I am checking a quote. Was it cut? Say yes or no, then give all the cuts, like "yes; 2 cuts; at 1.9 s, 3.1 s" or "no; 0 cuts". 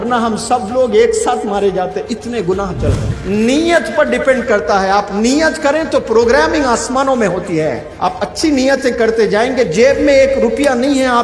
yes; 2 cuts; at 3.1 s, 7.9 s